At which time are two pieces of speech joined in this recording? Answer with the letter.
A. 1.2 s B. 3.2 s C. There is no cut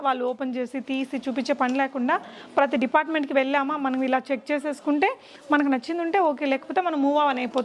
C